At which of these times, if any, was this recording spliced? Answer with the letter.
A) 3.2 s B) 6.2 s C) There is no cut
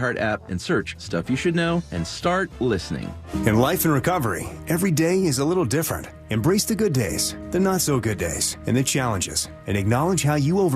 A